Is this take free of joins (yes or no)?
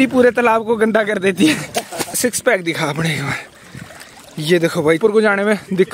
no